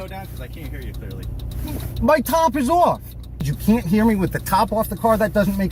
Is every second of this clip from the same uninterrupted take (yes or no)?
no